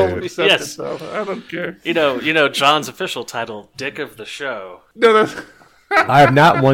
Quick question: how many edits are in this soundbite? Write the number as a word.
one